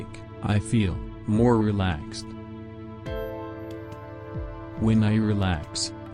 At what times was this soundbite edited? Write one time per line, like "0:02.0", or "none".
none